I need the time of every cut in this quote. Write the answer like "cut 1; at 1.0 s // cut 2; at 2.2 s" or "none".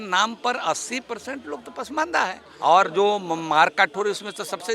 cut 1; at 2.5 s